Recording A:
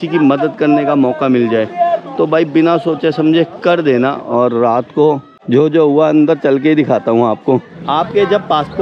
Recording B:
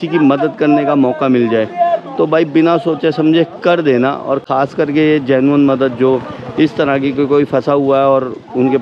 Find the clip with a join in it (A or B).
A